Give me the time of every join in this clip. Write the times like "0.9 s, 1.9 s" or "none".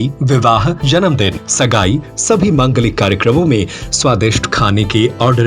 1.0 s